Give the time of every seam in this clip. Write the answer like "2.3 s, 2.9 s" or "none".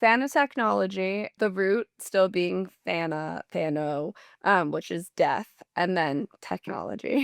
1.3 s